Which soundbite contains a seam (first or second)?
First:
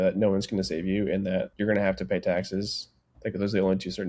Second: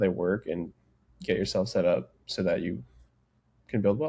first